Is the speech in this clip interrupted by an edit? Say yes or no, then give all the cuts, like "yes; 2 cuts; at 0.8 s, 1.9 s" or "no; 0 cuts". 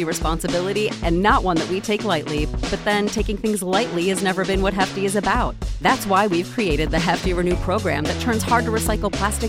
no; 0 cuts